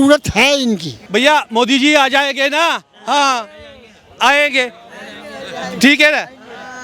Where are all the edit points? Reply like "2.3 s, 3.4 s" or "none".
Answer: 1.1 s